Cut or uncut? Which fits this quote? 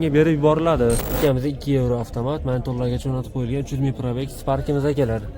cut